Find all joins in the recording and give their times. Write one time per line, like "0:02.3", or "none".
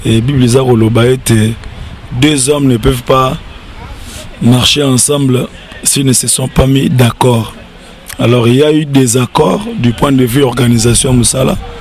none